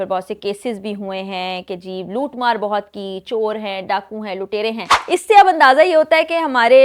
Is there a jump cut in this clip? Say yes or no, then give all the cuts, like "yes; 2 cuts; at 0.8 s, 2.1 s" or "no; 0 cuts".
yes; 1 cut; at 4.9 s